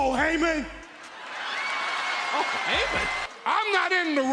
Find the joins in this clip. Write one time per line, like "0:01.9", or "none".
0:03.3